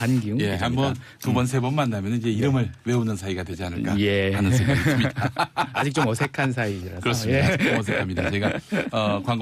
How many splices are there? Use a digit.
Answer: 1